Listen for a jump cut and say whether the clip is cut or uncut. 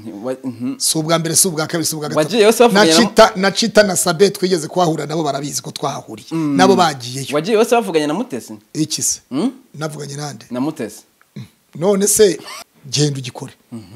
cut